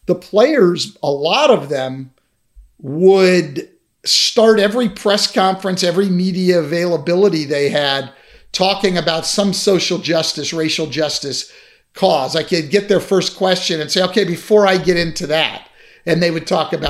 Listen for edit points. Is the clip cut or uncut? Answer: uncut